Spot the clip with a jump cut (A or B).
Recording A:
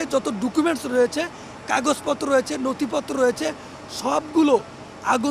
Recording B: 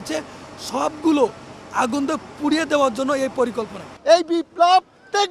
B